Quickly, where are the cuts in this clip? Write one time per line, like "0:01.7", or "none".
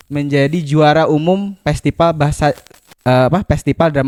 none

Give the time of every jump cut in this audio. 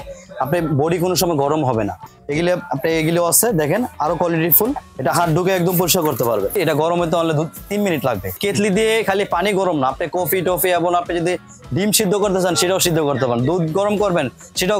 0:02.1
0:04.9
0:06.5
0:08.4

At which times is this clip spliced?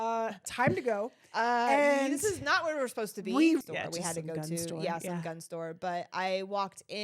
0:03.7

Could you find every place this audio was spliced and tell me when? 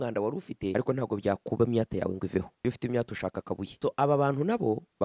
0:00.7
0:02.5
0:03.7

